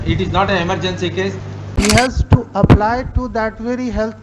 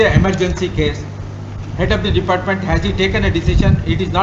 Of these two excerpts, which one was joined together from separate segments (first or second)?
first